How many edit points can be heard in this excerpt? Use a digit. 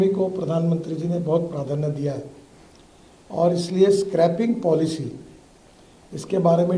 0